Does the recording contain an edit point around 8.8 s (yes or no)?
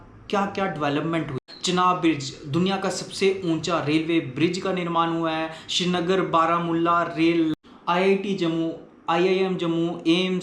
no